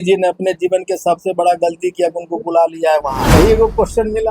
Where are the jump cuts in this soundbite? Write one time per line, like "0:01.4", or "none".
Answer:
0:03.3